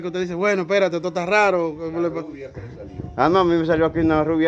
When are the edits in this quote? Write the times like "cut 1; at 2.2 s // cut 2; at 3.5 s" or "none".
none